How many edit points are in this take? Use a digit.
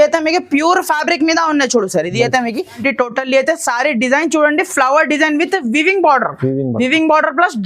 1